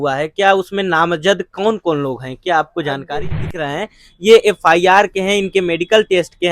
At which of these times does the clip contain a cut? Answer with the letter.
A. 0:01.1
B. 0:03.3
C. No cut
B